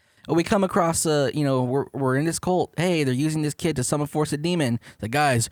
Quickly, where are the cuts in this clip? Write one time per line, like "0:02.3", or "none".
none